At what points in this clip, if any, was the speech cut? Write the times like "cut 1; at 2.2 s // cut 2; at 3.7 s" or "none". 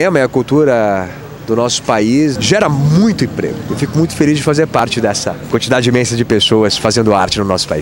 cut 1; at 2.4 s // cut 2; at 3.6 s // cut 3; at 4.8 s